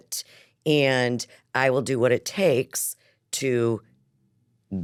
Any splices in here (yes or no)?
no